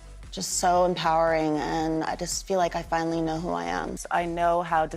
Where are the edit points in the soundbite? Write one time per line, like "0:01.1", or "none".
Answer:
0:03.9